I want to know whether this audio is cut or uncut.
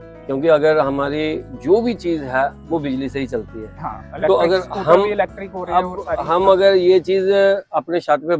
uncut